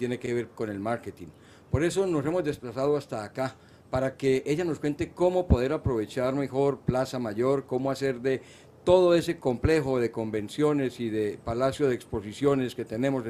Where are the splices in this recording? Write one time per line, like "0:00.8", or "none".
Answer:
none